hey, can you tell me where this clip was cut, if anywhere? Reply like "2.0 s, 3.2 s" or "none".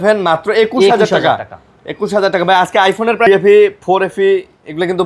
3.3 s